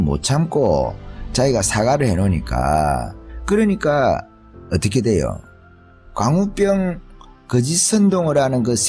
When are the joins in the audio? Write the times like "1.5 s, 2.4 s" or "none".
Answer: none